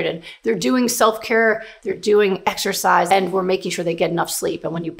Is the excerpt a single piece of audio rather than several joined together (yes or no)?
no